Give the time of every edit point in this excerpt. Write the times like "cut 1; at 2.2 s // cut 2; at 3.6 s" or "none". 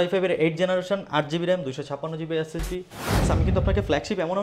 cut 1; at 3.2 s